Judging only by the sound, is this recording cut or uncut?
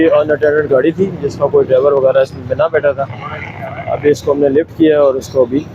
uncut